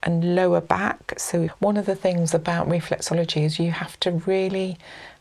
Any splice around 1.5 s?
yes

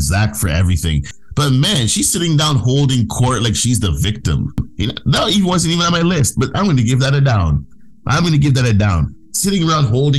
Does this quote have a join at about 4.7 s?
yes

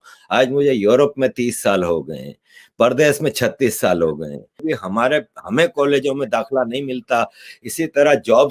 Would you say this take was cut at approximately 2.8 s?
no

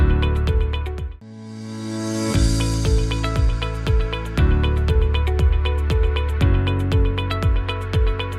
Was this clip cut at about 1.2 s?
yes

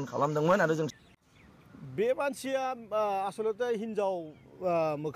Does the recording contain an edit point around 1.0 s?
yes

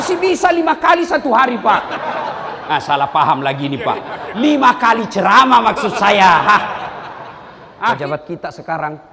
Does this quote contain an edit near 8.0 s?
yes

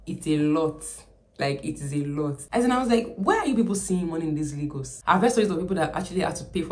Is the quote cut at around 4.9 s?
yes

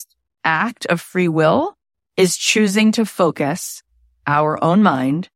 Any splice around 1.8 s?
no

